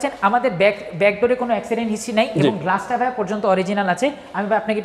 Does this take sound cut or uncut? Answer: uncut